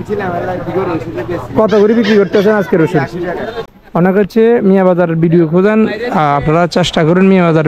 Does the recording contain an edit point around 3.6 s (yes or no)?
yes